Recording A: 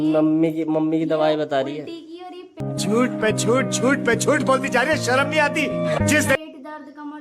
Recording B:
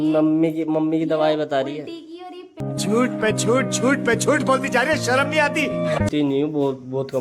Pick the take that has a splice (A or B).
B